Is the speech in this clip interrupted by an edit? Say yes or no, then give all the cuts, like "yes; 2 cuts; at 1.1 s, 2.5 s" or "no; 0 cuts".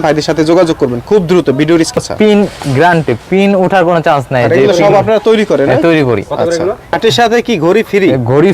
yes; 2 cuts; at 2.0 s, 7.0 s